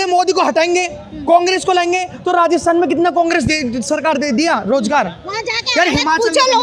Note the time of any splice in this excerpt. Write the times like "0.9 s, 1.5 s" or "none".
none